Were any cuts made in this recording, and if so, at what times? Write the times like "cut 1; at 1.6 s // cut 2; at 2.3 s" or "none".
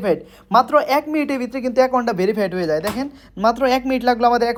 none